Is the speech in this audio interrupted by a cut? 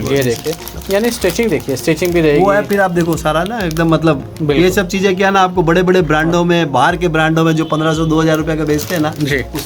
no; 0 cuts

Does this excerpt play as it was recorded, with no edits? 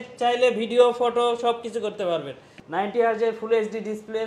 no; 1 cut; at 2.5 s

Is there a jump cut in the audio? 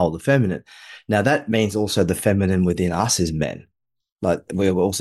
no; 0 cuts

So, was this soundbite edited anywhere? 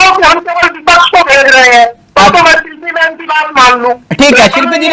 no; 0 cuts

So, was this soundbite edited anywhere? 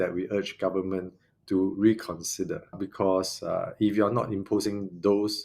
yes; 1 cut; at 2.8 s

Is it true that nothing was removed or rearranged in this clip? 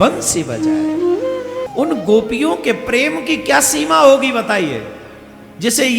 no; 1 cut; at 1.7 s

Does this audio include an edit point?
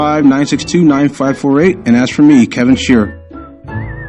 yes; 1 cut; at 3.1 s

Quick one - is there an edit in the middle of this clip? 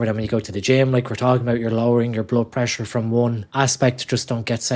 yes; 1 cut; at 3.4 s

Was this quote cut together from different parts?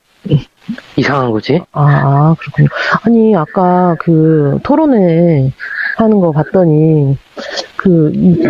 no; 0 cuts

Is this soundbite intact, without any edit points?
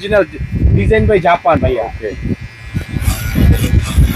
yes; 0 cuts

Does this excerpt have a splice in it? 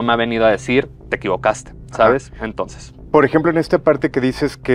no; 0 cuts

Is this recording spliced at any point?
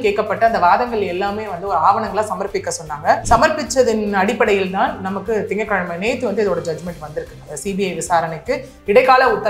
yes; 1 cut; at 7.4 s

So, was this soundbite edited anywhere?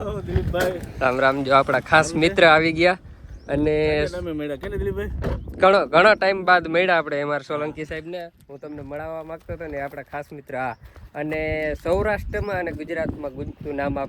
no; 0 cuts

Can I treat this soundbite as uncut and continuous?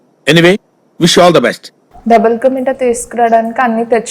no; 1 cut; at 1.7 s

